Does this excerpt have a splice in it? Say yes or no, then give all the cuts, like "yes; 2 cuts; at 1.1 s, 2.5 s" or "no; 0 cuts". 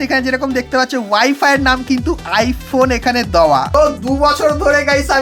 no; 0 cuts